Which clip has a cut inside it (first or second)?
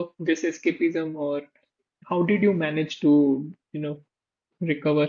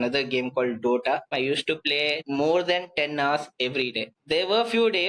second